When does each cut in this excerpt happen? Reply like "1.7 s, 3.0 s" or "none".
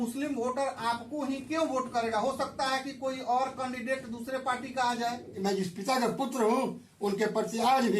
5.3 s